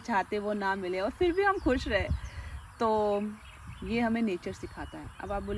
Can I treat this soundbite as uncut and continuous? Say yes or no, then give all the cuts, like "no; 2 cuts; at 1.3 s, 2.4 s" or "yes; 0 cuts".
yes; 0 cuts